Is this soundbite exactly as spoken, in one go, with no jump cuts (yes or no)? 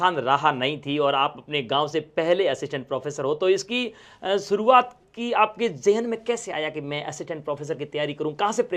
yes